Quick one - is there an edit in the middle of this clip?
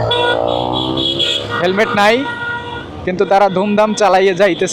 no; 0 cuts

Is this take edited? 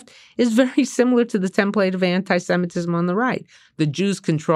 no; 0 cuts

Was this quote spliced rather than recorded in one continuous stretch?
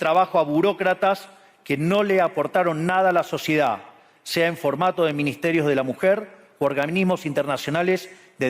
no; 0 cuts

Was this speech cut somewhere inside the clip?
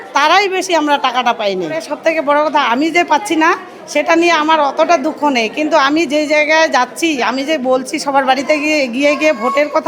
yes; 1 cut; at 1.9 s

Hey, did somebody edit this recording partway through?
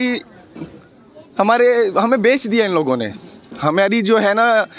no; 0 cuts

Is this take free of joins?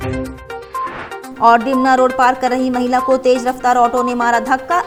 yes; 0 cuts

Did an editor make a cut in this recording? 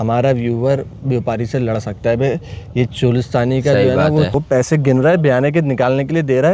yes; 1 cut; at 4.3 s

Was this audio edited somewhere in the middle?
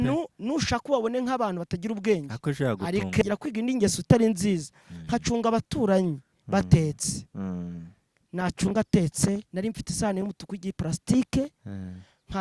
yes; 1 cut; at 3.2 s

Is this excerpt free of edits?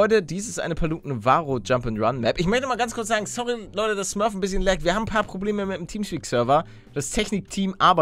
yes; 0 cuts

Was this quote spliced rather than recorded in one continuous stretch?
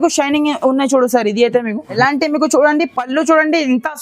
yes; 1 cut; at 1.9 s

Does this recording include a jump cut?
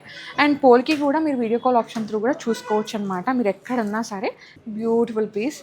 yes; 1 cut; at 4.5 s

